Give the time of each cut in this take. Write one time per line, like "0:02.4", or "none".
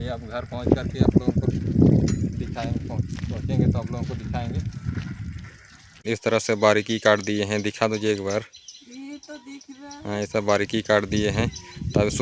0:06.0